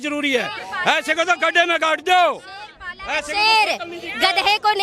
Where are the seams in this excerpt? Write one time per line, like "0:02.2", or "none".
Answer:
none